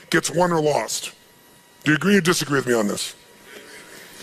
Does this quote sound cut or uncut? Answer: uncut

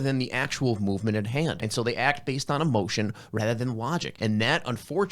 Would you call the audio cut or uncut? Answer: cut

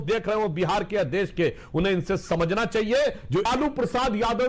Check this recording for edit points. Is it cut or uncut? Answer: cut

